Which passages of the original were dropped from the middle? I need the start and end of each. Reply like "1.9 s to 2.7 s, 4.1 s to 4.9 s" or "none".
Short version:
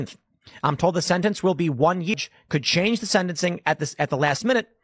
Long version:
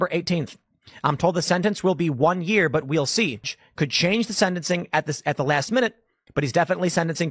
2.5 s to 3.4 s